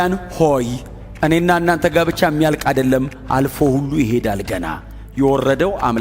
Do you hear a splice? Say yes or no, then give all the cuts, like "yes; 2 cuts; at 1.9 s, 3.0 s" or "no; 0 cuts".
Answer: no; 0 cuts